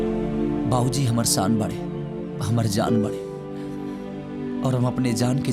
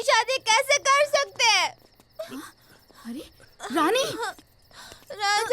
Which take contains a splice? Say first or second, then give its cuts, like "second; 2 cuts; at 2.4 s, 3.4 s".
second; 1 cut; at 3.4 s